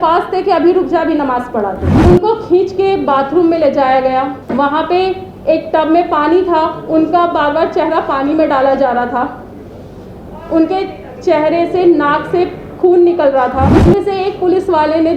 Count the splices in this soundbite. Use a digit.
3